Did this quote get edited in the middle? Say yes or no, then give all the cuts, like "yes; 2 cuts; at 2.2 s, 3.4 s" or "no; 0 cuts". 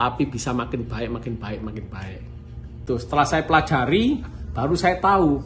yes; 1 cut; at 2.8 s